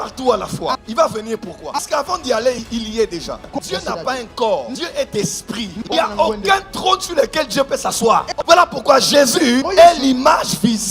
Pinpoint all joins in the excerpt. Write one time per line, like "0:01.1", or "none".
0:03.4
0:05.8
0:08.3